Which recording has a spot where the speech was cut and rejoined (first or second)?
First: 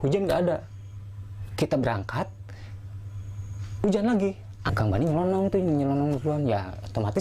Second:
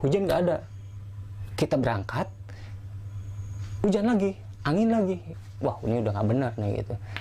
first